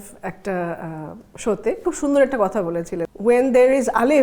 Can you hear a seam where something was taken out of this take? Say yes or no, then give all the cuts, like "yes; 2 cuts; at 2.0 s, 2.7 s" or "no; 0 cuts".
yes; 2 cuts; at 1.8 s, 3.0 s